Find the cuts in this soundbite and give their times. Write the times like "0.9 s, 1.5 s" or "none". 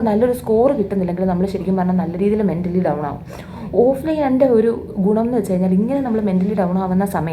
none